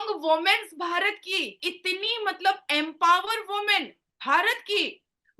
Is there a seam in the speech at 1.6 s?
yes; 1 cut; at 1.6 s

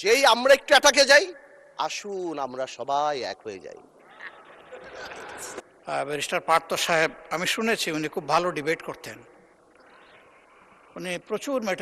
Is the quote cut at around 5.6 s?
yes; 1 cut; at 5.6 s

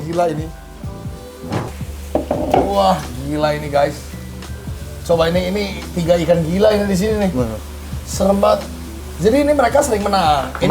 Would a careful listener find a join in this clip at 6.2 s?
no; 1 cut; at 1.7 s

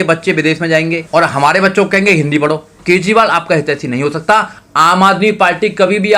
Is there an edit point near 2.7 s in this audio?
yes; 2 cuts; at 1.0 s, 2.7 s

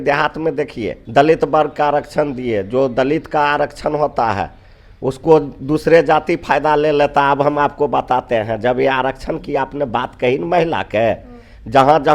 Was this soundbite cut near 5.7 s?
no; 1 cut; at 1.0 s

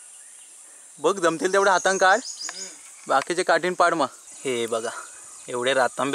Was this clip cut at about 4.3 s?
yes; 1 cut; at 4.3 s

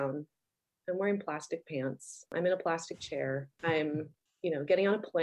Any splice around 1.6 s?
no; 2 cuts; at 3.5 s, 4.2 s

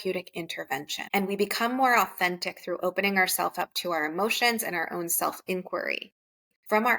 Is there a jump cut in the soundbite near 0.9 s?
yes; 1 cut; at 0.9 s

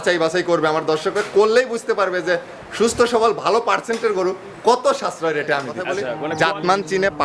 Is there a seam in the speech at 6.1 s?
yes; 1 cut; at 6.1 s

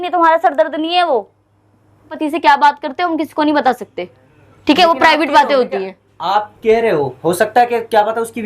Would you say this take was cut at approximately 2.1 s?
yes; 1 cut; at 2.1 s

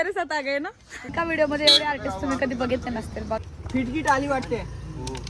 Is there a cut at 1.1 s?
yes; 2 cuts; at 1.1 s, 3.4 s

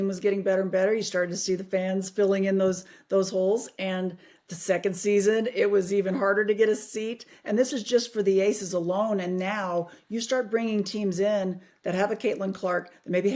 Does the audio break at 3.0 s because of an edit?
no; 0 cuts

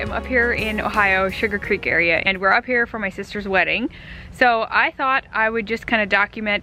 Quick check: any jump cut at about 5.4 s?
no; 0 cuts

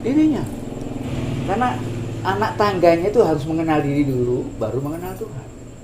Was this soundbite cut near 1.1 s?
yes; 1 cut; at 1.1 s

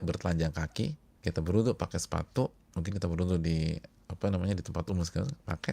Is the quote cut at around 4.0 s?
no; 2 cuts; at 1.1 s, 2.7 s

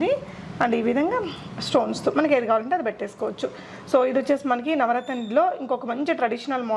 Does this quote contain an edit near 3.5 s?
no; 0 cuts

